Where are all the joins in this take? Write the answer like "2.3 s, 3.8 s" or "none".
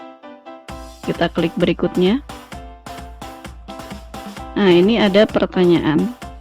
none